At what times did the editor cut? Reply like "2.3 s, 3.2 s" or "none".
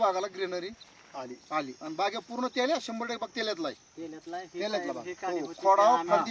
none